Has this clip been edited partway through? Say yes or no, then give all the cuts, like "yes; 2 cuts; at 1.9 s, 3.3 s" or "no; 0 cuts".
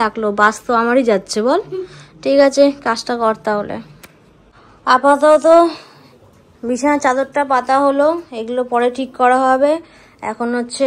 no; 0 cuts